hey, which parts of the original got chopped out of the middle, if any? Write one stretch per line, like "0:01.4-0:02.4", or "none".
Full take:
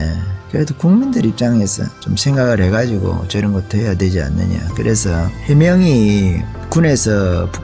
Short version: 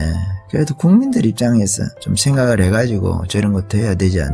none